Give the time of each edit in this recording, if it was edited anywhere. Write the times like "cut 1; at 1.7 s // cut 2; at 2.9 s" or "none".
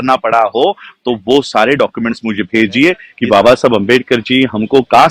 cut 1; at 3.1 s